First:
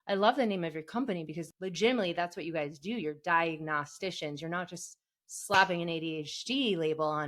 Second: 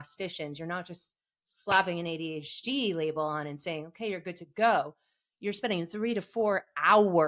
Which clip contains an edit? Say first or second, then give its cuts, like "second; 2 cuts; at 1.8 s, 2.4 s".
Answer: first; 1 cut; at 1.4 s